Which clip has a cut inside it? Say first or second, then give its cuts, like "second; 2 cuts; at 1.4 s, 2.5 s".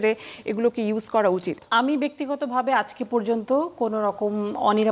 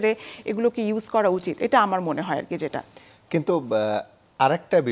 first; 1 cut; at 1.6 s